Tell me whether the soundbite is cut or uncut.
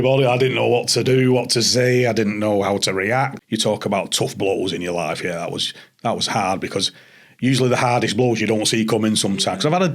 cut